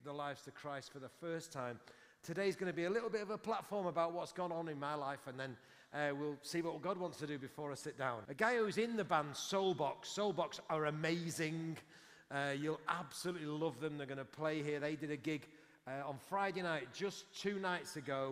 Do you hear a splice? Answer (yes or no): yes